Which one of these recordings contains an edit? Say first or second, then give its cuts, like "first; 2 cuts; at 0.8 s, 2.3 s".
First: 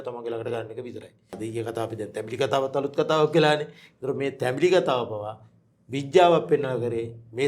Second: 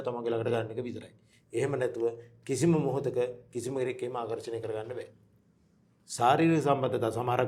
first; 1 cut; at 1.4 s